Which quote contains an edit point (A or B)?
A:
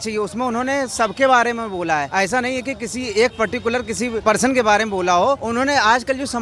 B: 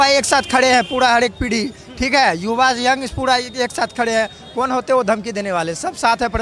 A